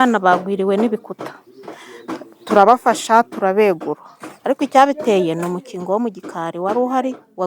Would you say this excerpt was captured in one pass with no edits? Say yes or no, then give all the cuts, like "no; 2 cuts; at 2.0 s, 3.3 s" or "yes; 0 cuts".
yes; 0 cuts